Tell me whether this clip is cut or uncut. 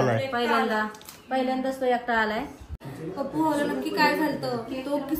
cut